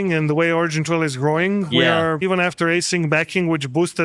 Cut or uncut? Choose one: cut